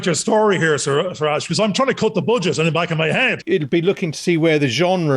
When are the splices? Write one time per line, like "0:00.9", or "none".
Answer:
0:03.4

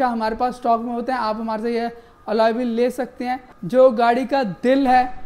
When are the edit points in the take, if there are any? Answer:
0:03.5

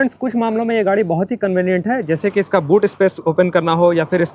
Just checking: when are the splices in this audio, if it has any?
none

